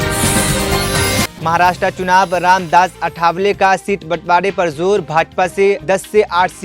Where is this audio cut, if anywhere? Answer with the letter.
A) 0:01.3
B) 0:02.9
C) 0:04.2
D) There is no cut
A